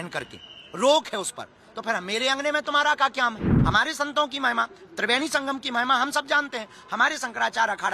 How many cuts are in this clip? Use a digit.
1